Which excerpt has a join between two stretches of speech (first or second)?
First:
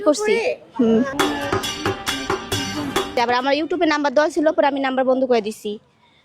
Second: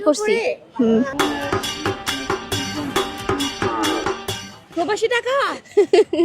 first